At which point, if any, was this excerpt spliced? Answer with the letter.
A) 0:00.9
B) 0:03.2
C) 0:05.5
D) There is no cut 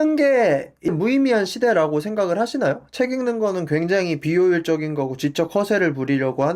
A